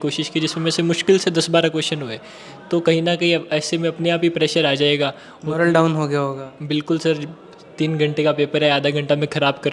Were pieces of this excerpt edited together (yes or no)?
no